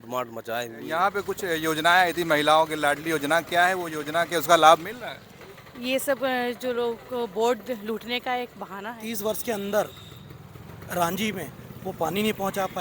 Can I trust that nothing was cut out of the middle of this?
no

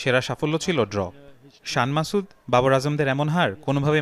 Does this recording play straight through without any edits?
yes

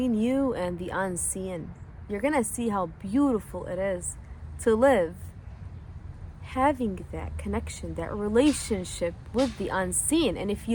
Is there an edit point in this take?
no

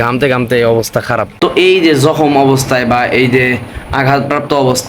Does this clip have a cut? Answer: yes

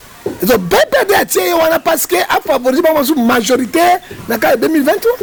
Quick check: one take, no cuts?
yes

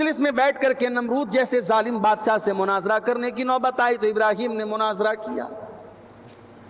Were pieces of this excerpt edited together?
no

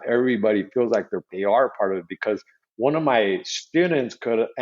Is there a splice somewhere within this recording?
yes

